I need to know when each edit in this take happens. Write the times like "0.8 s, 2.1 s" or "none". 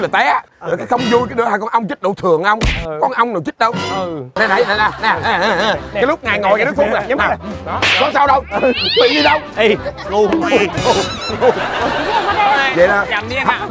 4.3 s

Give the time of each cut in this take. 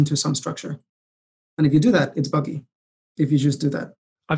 none

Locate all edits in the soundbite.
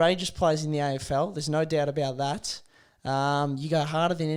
none

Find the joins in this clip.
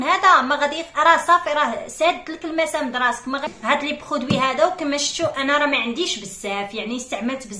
3.4 s

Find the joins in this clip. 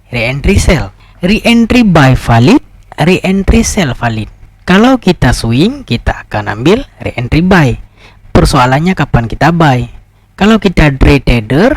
1.0 s

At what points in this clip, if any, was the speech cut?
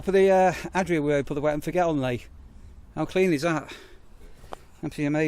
none

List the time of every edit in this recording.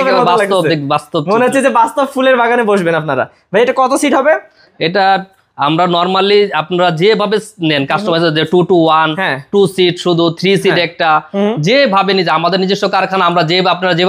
none

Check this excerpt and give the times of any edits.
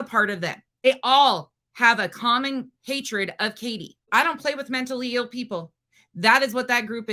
0.8 s, 4.1 s

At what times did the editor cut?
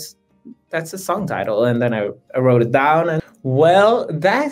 3.3 s

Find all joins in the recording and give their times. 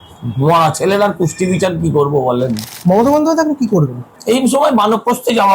2.7 s, 4.1 s

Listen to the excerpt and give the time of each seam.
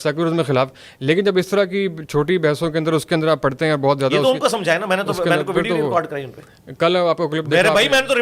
none

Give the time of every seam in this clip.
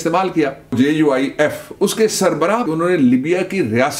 0.7 s, 2.7 s

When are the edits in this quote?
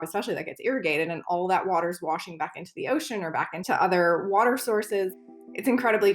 3.6 s, 5.1 s

